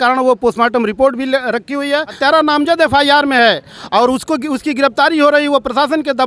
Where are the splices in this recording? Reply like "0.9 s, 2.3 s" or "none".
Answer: 2.1 s